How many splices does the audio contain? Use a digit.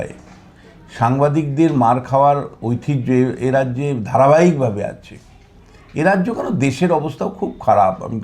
0